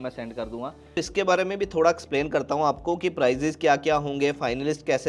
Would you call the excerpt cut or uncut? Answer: cut